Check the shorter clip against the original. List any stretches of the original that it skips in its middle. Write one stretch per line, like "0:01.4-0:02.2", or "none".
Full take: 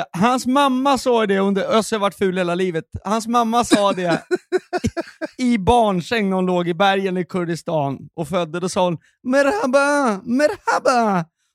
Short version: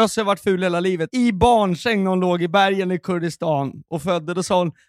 0:02.8-0:05.3